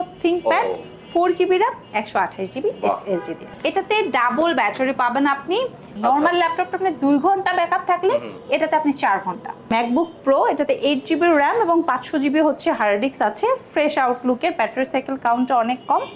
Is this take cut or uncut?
cut